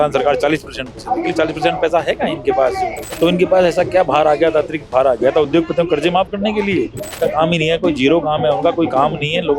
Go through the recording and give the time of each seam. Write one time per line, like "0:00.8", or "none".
0:03.0
0:07.1